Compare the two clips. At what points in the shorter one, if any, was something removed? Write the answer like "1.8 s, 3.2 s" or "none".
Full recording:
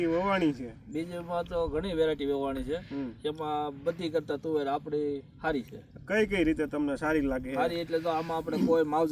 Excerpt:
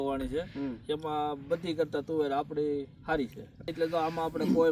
3.7 s